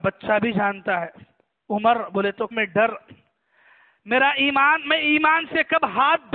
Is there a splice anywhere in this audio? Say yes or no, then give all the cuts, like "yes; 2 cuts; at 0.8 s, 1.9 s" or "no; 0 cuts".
yes; 1 cut; at 2.5 s